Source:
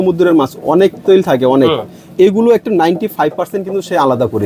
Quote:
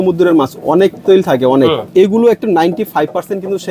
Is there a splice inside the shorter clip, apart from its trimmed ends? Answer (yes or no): yes